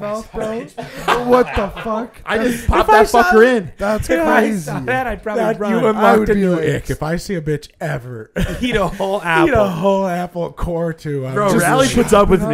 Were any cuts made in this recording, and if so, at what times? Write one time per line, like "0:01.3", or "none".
none